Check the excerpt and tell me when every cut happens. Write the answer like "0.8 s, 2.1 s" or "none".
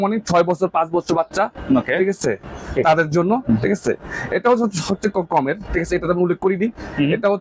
none